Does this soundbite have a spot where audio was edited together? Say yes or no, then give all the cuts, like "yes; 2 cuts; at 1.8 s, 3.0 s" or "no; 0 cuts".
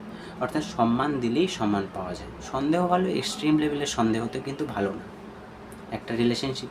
yes; 1 cut; at 2.4 s